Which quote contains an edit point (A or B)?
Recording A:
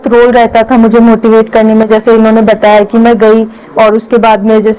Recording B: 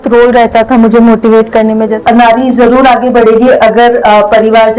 B